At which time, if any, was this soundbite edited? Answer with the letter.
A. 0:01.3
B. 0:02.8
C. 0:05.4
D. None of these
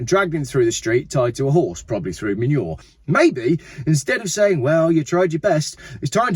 B